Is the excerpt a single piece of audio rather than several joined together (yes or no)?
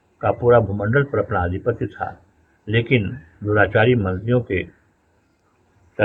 yes